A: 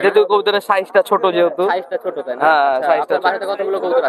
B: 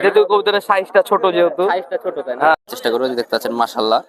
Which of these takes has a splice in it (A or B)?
B